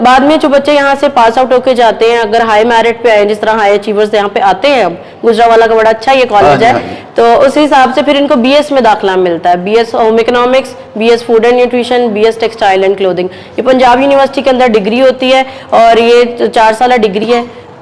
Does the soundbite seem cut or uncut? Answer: uncut